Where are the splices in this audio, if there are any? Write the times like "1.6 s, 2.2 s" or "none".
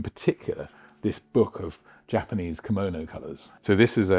none